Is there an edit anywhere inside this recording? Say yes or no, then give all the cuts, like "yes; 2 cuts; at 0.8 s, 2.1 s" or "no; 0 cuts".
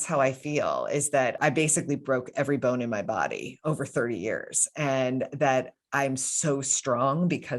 yes; 1 cut; at 1.4 s